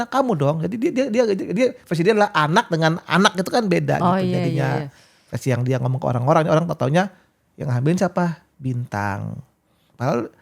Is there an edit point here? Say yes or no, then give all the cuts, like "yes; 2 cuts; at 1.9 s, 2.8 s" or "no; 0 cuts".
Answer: no; 0 cuts